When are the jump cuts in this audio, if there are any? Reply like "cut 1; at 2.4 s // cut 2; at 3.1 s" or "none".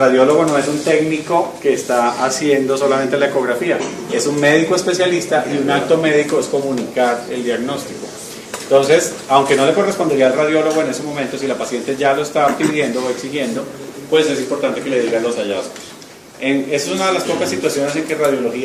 none